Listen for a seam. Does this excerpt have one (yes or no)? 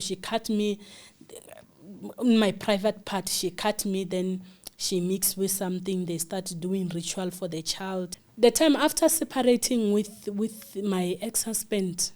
yes